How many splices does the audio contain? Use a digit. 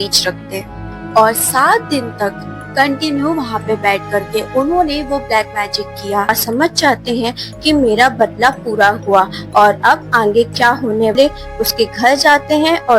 2